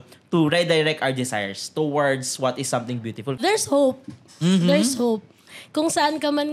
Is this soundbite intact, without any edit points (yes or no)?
no